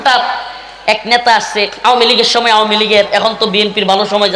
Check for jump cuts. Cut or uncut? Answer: uncut